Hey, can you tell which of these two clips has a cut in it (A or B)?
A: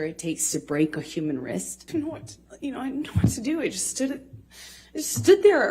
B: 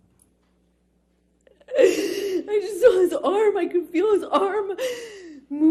A